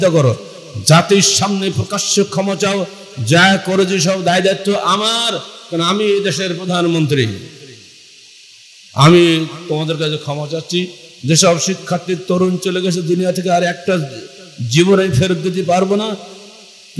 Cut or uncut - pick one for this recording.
uncut